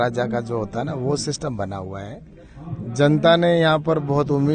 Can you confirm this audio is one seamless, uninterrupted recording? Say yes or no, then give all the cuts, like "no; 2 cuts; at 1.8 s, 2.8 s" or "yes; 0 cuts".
yes; 0 cuts